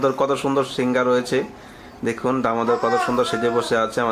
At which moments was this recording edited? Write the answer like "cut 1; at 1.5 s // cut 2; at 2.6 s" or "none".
none